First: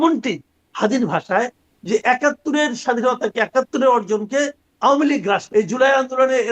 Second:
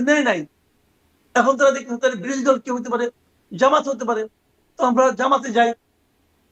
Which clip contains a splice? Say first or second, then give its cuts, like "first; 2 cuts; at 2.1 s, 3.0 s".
first; 1 cut; at 5.5 s